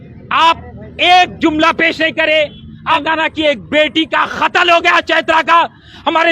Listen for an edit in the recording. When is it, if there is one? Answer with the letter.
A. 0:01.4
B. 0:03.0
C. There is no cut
B